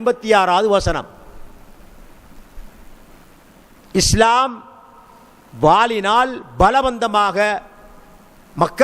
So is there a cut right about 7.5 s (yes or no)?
no